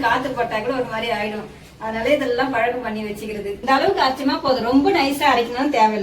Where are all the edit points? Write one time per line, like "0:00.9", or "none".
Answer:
0:03.6